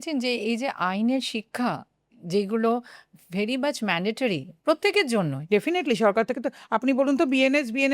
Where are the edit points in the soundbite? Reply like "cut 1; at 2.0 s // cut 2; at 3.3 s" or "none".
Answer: cut 1; at 5.4 s